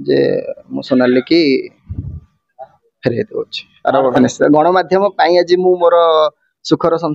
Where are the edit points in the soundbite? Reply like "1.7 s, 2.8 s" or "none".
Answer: 4.2 s